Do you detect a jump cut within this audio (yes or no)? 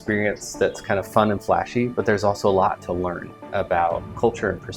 no